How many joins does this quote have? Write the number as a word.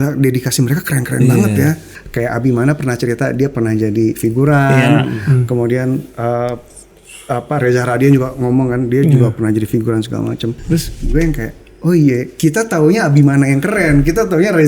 two